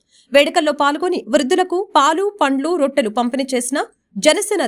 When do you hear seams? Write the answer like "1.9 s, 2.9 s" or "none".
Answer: none